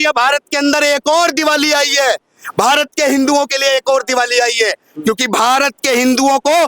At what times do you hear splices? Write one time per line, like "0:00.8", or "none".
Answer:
none